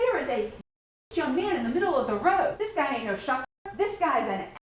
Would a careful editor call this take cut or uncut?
cut